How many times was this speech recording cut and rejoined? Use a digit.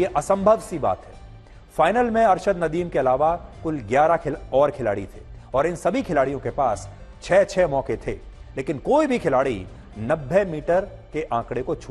0